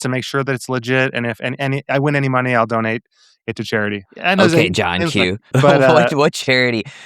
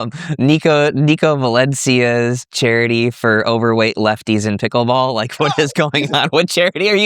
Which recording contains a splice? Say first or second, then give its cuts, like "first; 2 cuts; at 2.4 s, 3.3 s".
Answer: first; 2 cuts; at 4.0 s, 5.4 s